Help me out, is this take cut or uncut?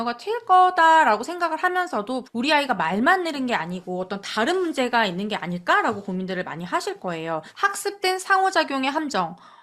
cut